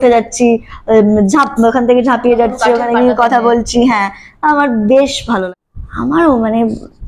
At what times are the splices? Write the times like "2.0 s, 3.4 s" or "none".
5.4 s